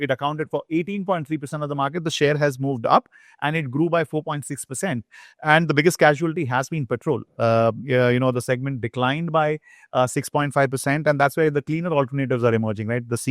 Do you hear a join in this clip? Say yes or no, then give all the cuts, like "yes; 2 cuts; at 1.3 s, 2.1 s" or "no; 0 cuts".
no; 0 cuts